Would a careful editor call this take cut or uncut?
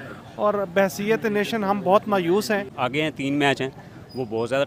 uncut